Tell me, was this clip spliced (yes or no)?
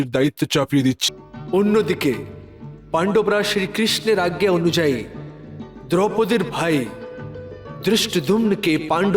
yes